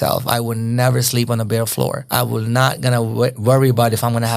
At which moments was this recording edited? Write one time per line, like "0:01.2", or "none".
0:02.0